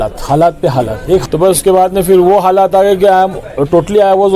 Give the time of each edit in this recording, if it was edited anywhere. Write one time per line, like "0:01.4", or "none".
0:01.2